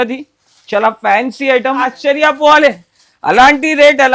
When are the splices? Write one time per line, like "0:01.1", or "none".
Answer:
0:01.9